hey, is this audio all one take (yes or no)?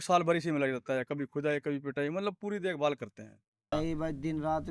no